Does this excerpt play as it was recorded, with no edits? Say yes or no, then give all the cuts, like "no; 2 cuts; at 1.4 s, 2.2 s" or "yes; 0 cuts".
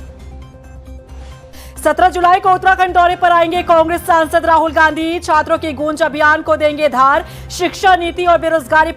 no; 1 cut; at 1.4 s